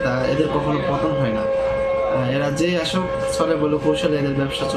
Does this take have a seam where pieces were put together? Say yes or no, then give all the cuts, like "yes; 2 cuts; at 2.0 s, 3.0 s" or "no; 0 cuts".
no; 0 cuts